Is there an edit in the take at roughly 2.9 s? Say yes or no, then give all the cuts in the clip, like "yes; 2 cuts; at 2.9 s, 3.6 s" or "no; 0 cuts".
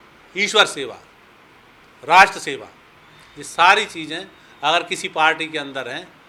no; 0 cuts